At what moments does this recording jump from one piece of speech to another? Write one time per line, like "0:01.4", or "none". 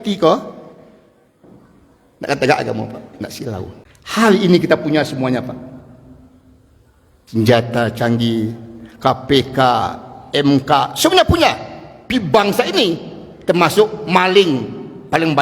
0:03.8